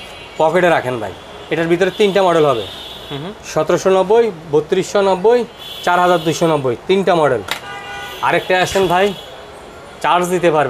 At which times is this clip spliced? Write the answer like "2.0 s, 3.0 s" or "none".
none